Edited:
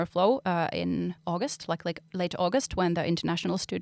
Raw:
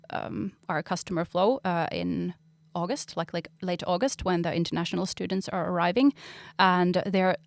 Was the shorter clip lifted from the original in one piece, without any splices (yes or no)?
no